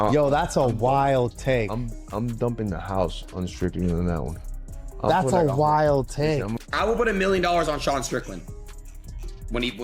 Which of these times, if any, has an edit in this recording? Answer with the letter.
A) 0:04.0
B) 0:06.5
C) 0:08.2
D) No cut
B